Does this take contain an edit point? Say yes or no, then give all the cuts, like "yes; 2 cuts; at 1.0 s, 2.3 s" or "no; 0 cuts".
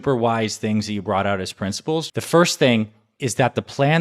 yes; 2 cuts; at 2.1 s, 3.0 s